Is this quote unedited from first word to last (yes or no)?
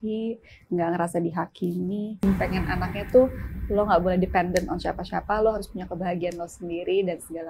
no